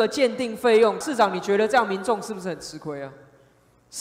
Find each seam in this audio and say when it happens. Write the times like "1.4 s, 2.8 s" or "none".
1.0 s